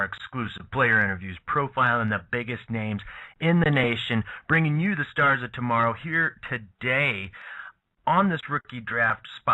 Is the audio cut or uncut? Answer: cut